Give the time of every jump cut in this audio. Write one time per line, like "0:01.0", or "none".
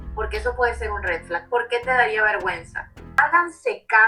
0:03.2